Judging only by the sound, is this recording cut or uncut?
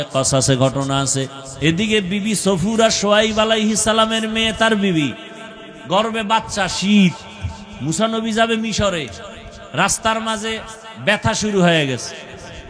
cut